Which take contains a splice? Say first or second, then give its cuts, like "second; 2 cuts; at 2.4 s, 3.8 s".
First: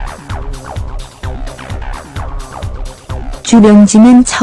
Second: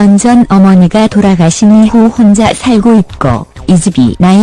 first; 1 cut; at 1.4 s